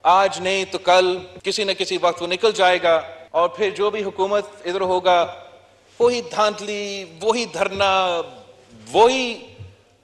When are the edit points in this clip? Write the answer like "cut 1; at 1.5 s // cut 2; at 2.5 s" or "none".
cut 1; at 1.3 s // cut 2; at 3.2 s